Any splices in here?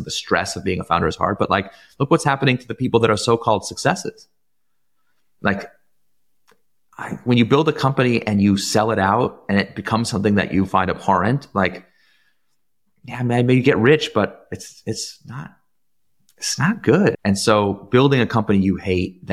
yes; 1 cut; at 17.1 s

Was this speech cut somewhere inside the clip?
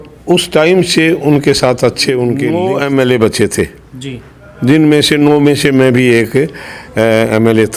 yes; 1 cut; at 2.6 s

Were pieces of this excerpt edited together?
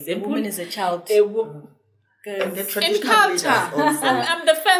no; 0 cuts

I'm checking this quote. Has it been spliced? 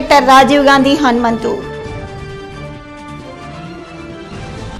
no; 0 cuts

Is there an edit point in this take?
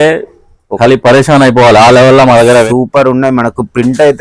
yes; 1 cut; at 2.7 s

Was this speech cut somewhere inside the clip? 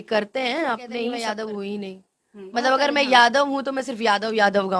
yes; 1 cut; at 1.1 s

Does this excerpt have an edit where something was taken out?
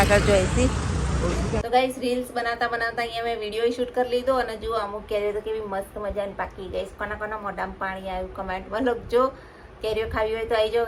yes; 1 cut; at 1.5 s

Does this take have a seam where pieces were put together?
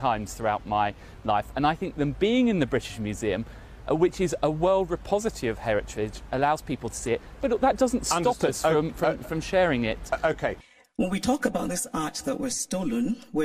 yes; 1 cut; at 10.7 s

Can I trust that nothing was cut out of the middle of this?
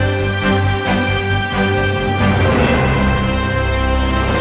yes; 0 cuts

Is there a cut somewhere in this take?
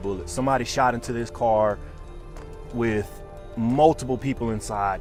no; 0 cuts

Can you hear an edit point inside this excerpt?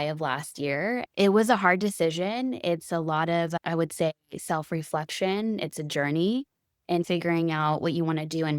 yes; 1 cut; at 1.1 s

